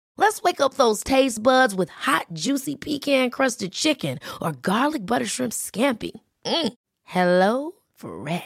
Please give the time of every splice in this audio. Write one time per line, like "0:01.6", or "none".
none